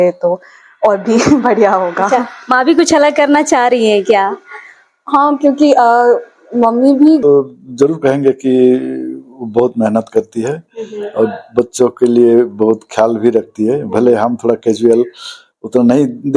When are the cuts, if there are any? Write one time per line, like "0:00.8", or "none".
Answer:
0:07.2